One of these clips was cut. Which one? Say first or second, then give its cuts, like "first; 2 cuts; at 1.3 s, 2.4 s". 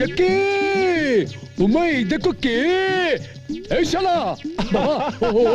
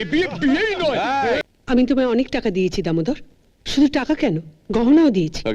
second; 1 cut; at 1.4 s